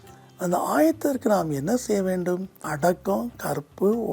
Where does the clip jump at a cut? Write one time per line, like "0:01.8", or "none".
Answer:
0:02.7